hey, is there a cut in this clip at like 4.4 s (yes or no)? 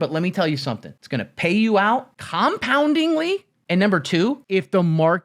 yes